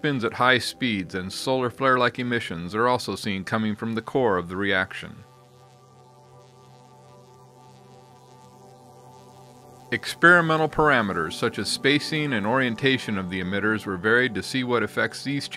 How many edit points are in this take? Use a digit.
0